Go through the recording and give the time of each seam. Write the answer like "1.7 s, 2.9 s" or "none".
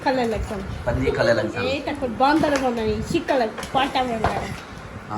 1.8 s